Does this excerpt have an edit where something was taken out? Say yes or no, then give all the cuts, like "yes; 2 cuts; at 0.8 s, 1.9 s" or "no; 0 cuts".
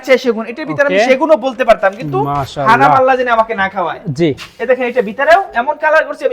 no; 0 cuts